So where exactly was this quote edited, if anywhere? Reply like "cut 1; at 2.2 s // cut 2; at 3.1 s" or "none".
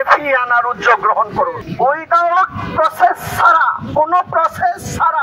cut 1; at 1.6 s